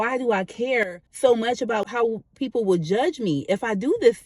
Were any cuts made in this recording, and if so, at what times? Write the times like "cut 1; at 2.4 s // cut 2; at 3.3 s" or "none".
cut 1; at 1.9 s